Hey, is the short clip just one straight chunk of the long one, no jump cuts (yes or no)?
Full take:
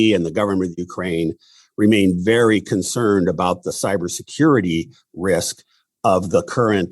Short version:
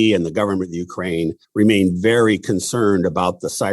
no